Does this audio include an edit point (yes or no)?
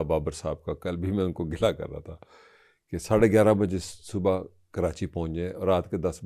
no